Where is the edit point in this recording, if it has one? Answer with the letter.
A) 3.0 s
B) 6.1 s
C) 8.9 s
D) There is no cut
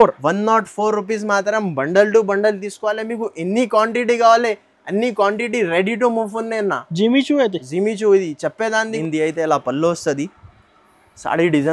C